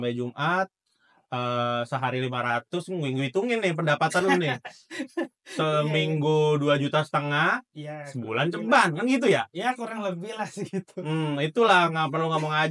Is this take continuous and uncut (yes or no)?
yes